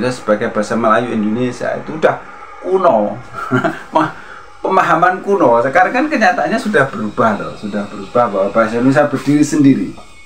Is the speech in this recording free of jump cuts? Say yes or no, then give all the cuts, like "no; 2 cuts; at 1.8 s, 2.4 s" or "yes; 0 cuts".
yes; 0 cuts